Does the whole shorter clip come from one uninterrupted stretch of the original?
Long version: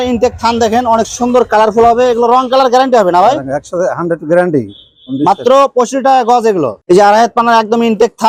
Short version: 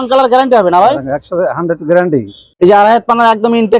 no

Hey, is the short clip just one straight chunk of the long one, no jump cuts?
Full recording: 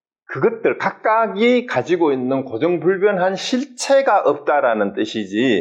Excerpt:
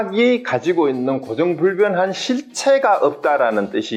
yes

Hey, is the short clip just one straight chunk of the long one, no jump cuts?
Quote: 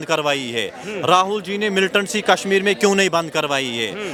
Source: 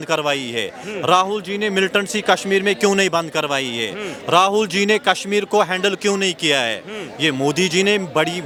yes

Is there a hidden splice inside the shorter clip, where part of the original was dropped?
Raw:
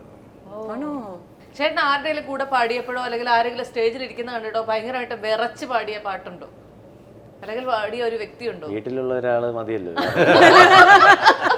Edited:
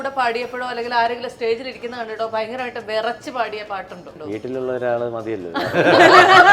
yes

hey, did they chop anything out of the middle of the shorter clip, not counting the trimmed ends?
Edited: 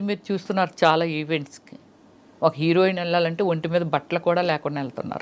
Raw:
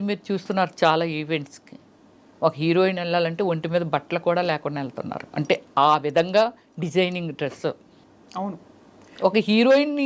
no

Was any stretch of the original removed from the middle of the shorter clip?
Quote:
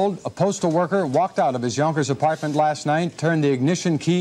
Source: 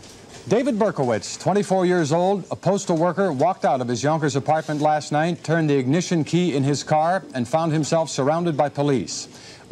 no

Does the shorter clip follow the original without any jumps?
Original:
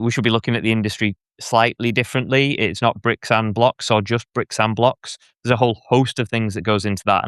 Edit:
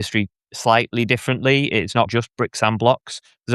no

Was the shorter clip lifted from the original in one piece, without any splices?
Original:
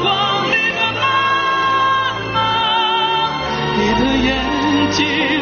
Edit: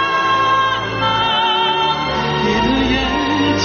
yes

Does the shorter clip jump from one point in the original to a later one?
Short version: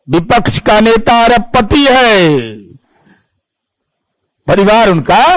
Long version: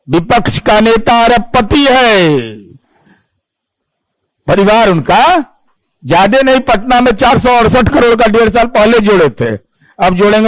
no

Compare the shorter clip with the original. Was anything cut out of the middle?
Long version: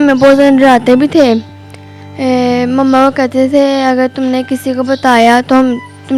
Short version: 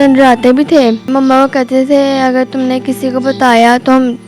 yes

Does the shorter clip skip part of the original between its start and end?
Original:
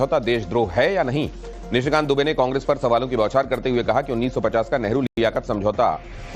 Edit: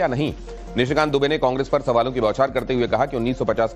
no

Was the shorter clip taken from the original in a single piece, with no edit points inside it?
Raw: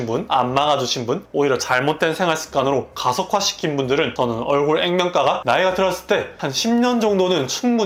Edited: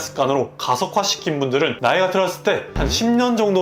no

